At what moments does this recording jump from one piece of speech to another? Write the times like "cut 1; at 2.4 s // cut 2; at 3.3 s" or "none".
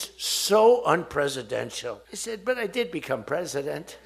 cut 1; at 2.1 s